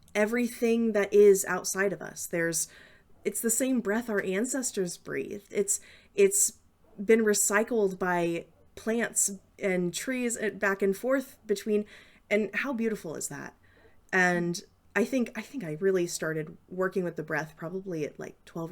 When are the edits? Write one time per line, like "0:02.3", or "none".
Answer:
none